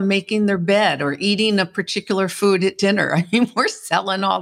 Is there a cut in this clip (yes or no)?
no